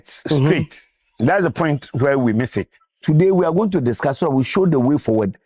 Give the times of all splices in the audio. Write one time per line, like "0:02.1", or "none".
0:03.0